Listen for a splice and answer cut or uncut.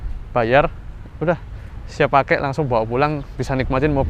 uncut